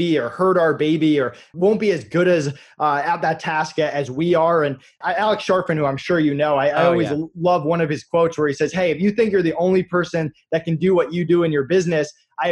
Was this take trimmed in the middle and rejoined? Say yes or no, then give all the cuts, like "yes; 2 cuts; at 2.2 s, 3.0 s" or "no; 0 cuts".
yes; 2 cuts; at 1.5 s, 4.9 s